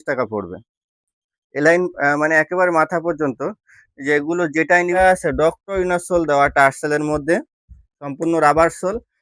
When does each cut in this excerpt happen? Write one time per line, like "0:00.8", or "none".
0:05.0